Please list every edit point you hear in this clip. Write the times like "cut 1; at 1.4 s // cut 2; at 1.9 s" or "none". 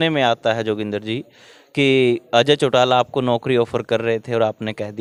none